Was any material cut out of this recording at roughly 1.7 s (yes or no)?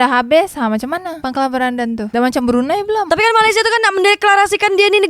no